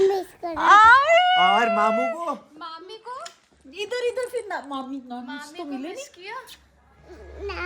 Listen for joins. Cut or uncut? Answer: uncut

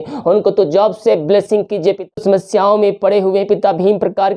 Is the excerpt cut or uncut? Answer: cut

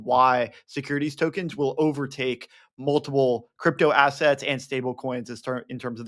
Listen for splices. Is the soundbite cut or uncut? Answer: uncut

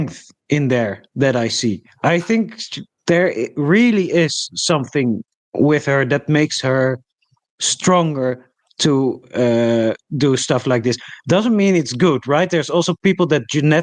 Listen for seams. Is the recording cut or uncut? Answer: uncut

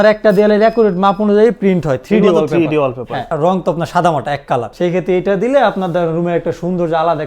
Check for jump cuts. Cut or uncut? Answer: cut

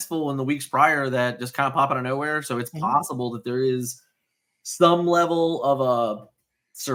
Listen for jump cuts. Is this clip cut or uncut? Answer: uncut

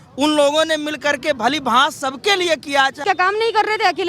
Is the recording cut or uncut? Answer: uncut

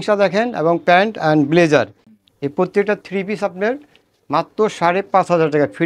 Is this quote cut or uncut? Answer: uncut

